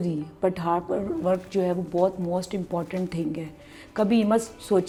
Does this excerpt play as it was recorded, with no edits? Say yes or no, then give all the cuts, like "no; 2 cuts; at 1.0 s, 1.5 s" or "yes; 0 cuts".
yes; 0 cuts